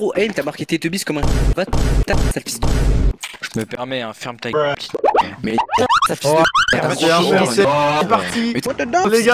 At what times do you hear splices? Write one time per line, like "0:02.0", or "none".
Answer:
none